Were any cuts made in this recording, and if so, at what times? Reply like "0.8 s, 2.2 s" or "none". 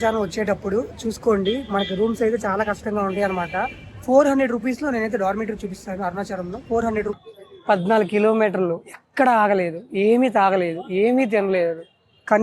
7.1 s